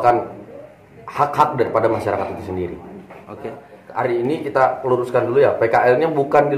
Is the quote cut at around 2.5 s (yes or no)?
no